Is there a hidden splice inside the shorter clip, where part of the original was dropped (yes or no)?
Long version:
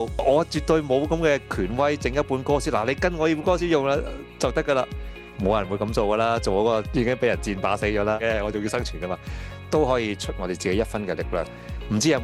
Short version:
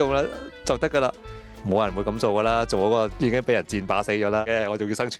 no